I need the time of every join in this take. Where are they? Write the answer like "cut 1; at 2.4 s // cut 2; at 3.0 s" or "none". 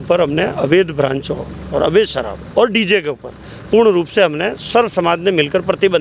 none